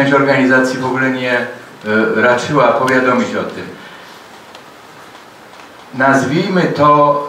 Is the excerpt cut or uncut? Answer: uncut